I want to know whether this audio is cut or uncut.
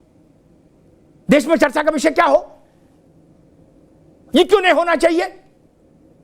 uncut